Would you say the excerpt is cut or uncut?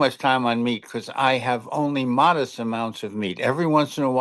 uncut